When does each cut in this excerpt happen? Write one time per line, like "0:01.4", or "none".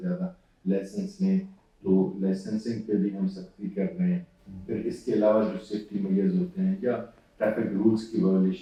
none